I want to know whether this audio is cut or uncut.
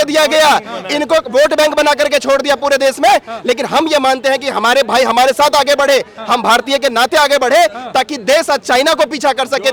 uncut